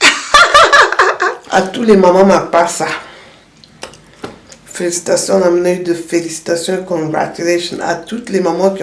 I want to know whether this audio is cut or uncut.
cut